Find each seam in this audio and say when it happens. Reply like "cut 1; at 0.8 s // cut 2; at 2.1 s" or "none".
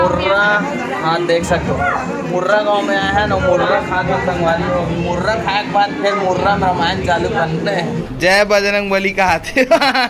cut 1; at 8.0 s

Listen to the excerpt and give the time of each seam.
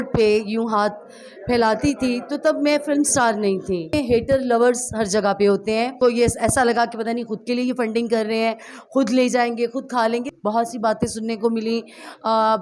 cut 1; at 3.9 s // cut 2; at 5.9 s // cut 3; at 10.3 s

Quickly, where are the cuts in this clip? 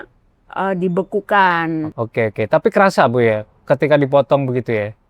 cut 1; at 1.9 s

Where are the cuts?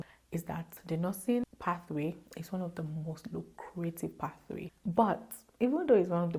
none

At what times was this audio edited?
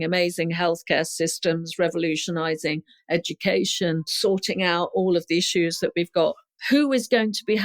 cut 1; at 4.1 s // cut 2; at 6.6 s

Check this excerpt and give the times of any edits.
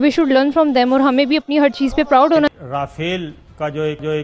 cut 1; at 2.5 s

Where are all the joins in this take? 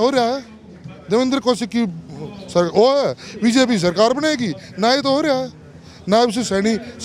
none

